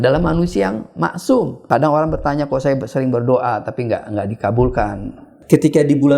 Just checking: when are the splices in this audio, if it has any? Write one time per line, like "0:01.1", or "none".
0:01.6
0:05.3